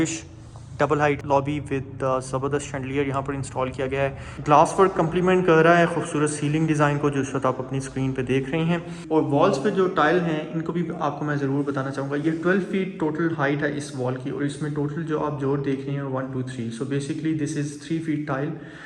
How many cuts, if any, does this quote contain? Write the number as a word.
three